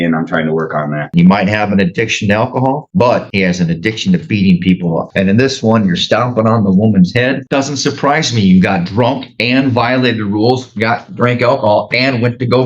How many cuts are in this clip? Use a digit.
3